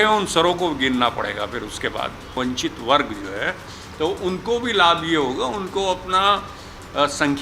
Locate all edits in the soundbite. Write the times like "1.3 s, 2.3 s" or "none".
2.4 s